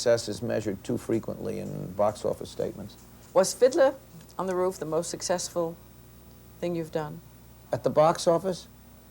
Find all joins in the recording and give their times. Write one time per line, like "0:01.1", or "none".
0:03.2
0:07.6